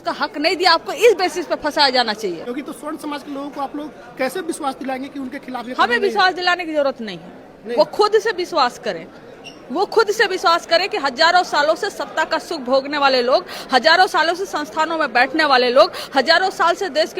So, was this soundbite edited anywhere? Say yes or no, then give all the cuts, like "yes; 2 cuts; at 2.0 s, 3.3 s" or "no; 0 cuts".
yes; 1 cut; at 2.5 s